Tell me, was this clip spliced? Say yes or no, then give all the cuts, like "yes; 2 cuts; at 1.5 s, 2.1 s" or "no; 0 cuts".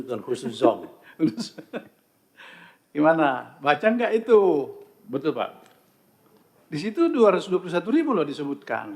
no; 0 cuts